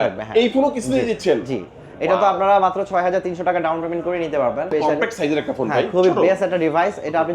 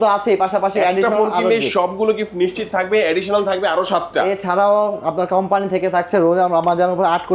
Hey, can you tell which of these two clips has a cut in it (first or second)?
first